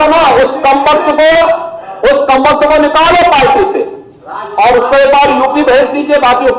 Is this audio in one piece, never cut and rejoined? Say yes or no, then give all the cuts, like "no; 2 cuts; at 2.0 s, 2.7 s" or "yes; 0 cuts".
yes; 0 cuts